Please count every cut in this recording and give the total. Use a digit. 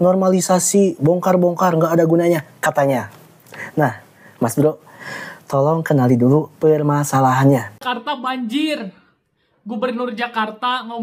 1